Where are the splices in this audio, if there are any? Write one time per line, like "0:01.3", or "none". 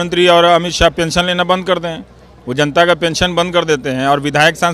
none